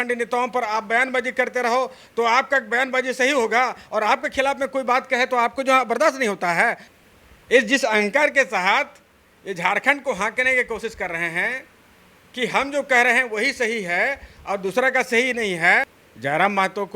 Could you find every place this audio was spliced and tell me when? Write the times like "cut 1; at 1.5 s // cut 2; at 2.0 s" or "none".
cut 1; at 6.9 s // cut 2; at 16.0 s